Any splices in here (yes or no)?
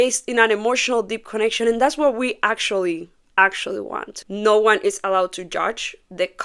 yes